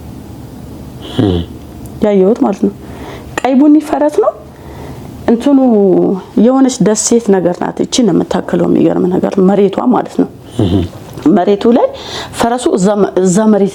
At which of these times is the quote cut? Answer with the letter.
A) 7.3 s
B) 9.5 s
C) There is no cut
C